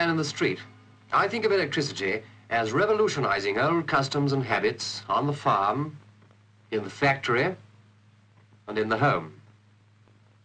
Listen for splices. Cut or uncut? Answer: uncut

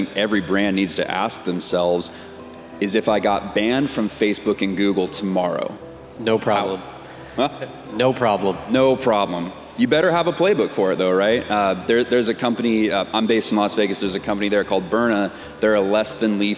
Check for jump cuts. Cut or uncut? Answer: uncut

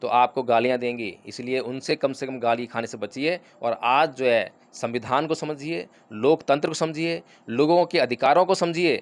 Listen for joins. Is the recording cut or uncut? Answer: uncut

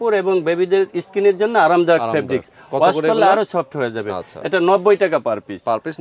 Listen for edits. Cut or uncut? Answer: uncut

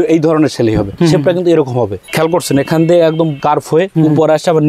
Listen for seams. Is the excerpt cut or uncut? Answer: cut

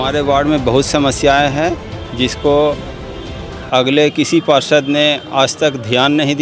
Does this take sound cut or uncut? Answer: uncut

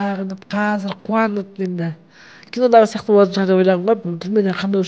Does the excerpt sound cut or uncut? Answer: cut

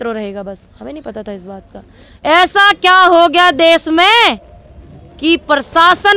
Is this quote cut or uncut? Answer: cut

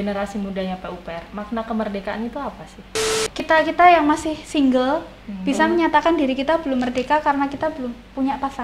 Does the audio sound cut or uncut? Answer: cut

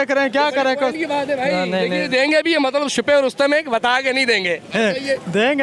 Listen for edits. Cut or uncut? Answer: uncut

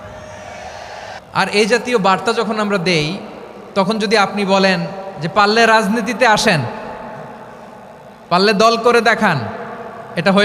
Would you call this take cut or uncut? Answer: cut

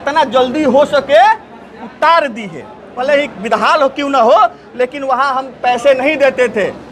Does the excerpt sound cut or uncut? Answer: cut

